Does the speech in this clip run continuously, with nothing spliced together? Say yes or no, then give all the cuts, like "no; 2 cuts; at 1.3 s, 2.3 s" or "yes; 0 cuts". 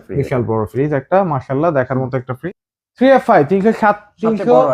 no; 1 cut; at 2.3 s